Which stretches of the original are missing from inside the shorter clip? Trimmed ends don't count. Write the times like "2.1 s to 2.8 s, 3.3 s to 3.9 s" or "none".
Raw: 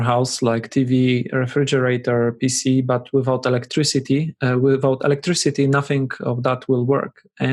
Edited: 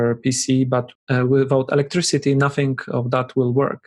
3.1 s to 4.2 s